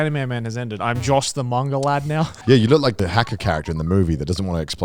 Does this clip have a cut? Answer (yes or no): yes